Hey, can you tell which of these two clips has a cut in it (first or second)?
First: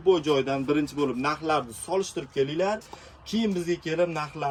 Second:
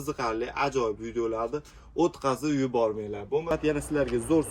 second